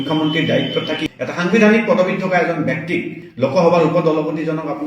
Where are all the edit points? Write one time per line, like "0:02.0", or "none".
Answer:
0:01.0